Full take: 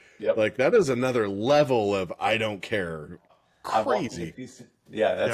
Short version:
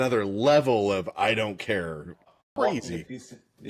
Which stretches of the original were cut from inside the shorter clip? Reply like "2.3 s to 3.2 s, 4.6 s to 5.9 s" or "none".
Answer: 3.6 s to 3.8 s